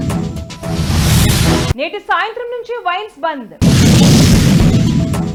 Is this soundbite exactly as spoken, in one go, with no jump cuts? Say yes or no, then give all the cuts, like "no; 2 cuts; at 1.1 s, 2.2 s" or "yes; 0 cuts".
yes; 0 cuts